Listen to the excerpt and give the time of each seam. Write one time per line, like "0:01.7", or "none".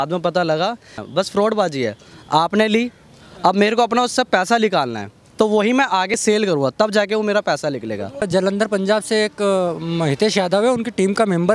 0:01.0
0:06.2
0:08.3